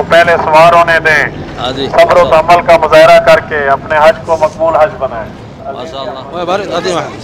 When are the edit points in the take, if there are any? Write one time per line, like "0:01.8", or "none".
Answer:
0:05.8